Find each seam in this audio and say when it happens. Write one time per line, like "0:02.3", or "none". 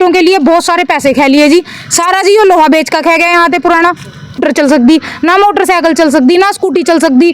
0:04.4